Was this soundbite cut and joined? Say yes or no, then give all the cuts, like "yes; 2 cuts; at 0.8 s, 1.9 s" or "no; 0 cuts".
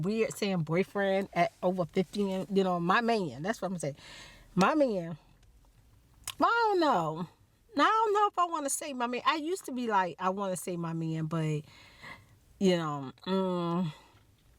no; 0 cuts